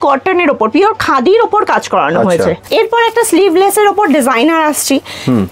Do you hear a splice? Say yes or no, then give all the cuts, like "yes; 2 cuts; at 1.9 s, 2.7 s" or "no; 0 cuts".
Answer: yes; 1 cut; at 2.6 s